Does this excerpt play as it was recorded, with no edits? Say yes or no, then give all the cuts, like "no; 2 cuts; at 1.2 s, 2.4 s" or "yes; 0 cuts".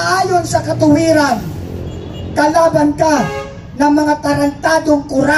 yes; 0 cuts